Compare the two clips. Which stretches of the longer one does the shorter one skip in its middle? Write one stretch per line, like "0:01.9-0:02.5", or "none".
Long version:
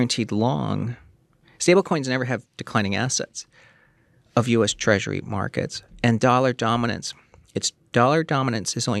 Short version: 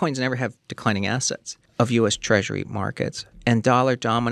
0:03.5-0:04.1